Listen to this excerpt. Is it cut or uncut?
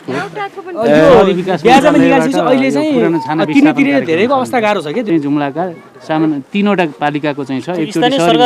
cut